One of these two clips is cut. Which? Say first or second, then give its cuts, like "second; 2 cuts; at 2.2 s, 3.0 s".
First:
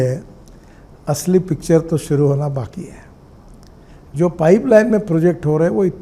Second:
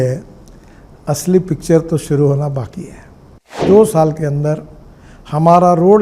second; 1 cut; at 3.6 s